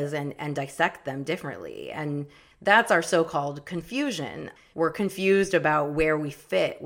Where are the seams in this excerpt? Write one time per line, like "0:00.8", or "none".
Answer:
0:02.4
0:04.5